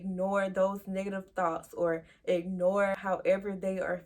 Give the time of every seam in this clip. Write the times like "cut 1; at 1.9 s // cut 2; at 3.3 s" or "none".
cut 1; at 2.9 s